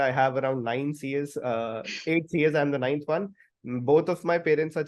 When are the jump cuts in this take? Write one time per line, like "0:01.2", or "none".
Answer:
none